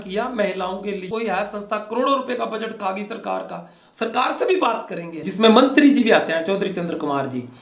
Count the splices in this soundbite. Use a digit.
2